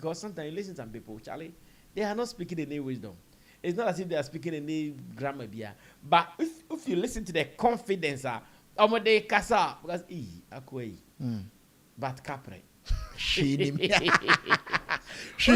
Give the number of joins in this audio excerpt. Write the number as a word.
zero